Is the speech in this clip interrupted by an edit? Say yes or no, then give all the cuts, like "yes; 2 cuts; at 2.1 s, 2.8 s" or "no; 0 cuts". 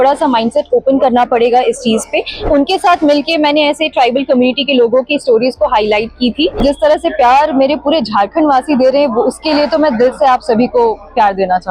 yes; 2 cuts; at 2.5 s, 6.6 s